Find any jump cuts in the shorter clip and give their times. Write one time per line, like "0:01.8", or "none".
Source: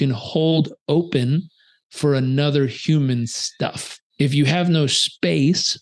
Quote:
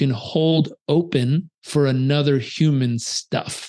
0:01.5